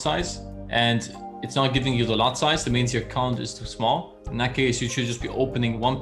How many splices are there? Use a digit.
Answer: 0